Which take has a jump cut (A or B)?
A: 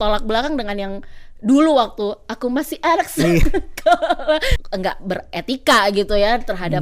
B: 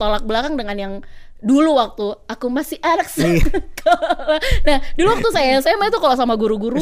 A